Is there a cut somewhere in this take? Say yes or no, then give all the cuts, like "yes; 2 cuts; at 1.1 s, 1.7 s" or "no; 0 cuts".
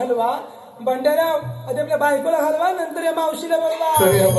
no; 0 cuts